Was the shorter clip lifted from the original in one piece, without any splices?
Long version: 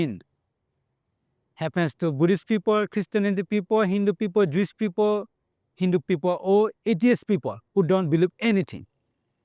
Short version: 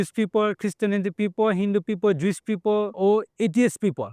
no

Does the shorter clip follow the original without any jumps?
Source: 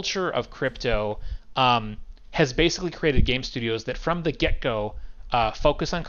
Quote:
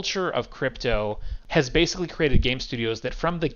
no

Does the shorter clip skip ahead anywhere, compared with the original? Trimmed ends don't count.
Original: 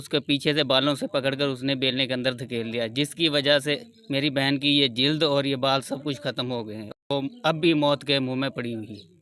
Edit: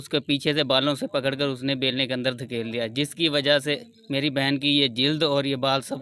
no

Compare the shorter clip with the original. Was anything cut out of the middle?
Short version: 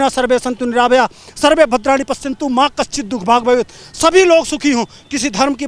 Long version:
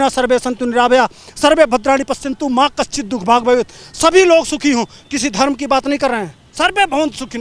no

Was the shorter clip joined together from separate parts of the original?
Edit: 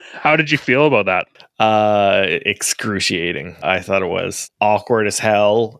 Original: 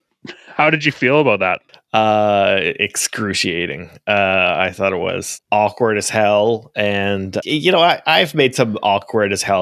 yes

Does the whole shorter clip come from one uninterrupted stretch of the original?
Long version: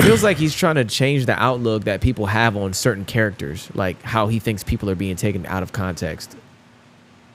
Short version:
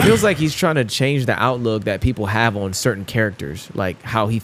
yes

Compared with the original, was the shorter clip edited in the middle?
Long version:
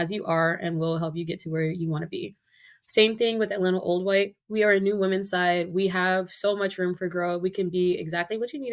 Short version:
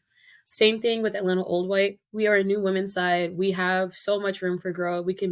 no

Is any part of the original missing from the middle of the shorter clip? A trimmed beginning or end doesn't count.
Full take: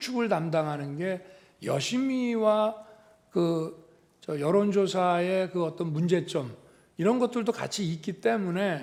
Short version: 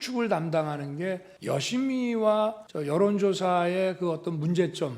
yes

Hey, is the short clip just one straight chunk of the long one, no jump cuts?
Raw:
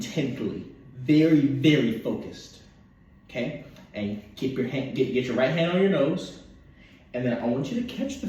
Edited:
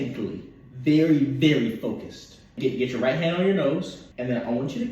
no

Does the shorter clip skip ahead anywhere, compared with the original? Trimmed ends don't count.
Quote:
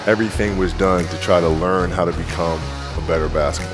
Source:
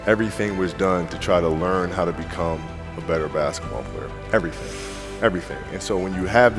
no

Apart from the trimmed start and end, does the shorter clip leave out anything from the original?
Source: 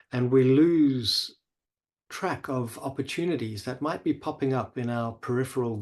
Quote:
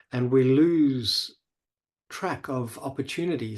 no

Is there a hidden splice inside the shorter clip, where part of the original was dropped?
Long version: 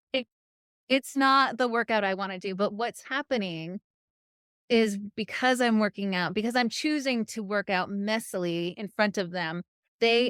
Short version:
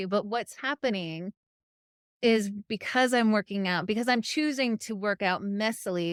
no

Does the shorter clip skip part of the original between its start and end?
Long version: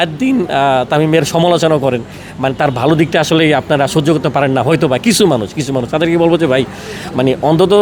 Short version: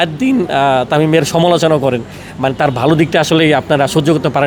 no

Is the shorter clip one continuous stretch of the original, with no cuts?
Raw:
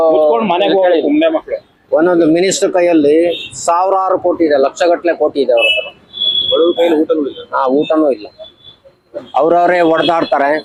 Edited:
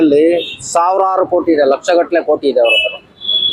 yes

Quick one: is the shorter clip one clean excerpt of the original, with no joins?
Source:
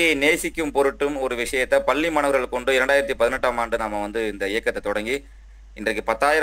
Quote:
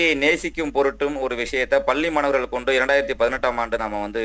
yes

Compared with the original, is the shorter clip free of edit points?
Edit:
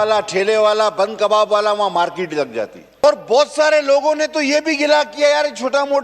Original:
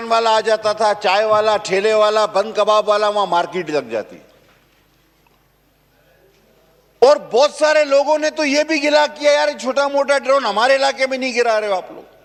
no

